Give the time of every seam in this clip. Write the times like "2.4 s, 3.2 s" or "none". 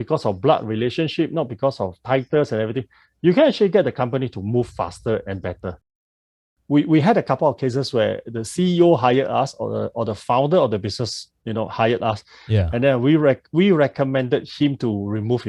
6.2 s

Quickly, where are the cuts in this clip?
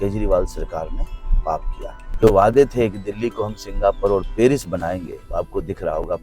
2.0 s, 5.2 s

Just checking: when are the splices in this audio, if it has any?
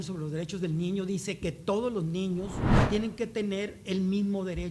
2.7 s

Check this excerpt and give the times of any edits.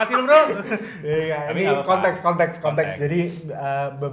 none

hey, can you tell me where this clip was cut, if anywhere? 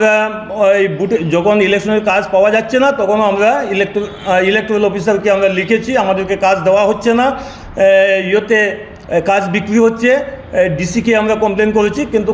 none

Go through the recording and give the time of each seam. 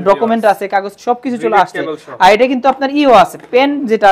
none

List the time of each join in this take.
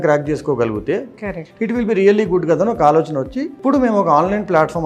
3.6 s

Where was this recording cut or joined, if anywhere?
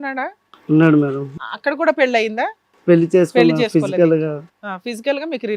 1.4 s

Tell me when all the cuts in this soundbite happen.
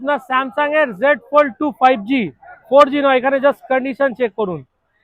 none

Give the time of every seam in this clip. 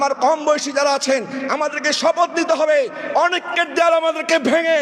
none

